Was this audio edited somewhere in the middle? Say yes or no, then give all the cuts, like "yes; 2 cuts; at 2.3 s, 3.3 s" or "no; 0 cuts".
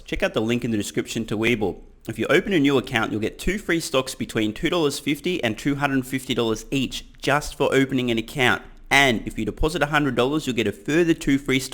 no; 0 cuts